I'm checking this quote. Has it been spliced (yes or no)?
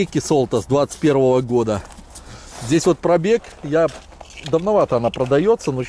no